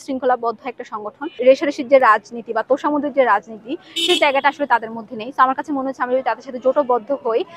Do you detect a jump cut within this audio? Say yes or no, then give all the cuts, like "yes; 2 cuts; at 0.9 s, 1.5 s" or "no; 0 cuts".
yes; 1 cut; at 1.4 s